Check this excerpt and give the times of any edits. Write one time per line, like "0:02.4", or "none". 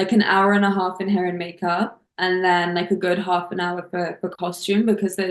none